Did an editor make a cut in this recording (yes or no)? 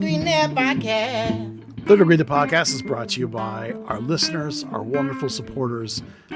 yes